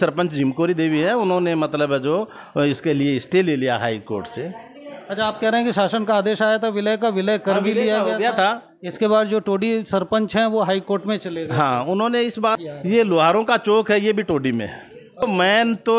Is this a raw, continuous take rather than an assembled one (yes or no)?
no